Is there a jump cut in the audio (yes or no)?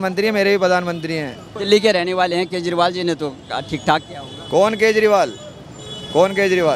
no